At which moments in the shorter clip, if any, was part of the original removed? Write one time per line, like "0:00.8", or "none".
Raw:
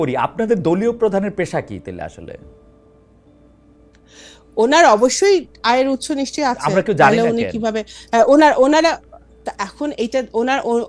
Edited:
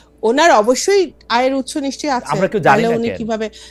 none